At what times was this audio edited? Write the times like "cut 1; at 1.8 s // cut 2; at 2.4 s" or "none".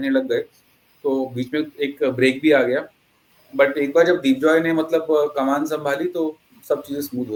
none